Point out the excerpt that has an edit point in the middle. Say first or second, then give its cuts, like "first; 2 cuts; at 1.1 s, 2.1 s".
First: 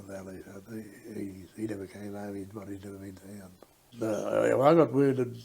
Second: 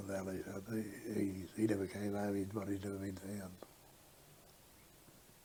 first; 1 cut; at 3.9 s